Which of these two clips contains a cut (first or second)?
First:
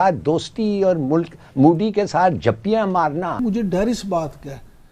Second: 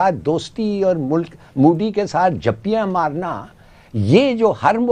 first